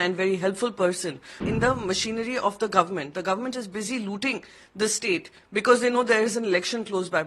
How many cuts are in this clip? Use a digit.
1